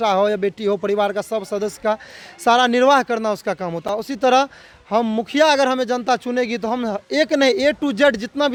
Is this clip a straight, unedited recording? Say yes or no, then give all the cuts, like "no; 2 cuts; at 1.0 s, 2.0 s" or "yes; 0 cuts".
yes; 0 cuts